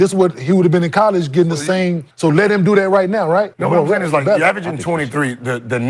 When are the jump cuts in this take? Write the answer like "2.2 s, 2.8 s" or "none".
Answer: 2.0 s, 3.5 s